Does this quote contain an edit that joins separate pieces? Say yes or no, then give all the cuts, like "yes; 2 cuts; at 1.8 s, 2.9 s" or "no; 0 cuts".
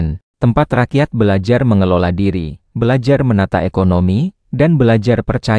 no; 0 cuts